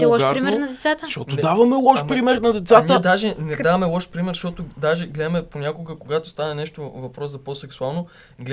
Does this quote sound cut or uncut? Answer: uncut